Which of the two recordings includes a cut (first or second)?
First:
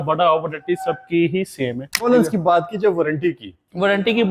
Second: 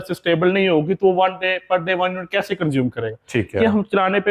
first